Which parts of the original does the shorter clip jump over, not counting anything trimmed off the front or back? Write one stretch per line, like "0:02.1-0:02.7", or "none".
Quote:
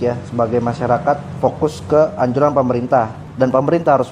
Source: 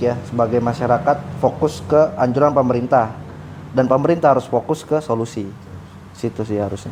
0:03.2-0:03.6